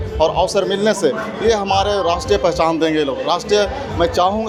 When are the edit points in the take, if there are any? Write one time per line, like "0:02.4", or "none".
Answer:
none